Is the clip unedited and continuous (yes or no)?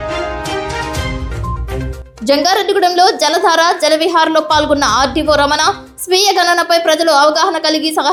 yes